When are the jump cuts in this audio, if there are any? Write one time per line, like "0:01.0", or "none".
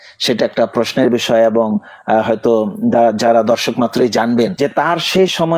0:04.5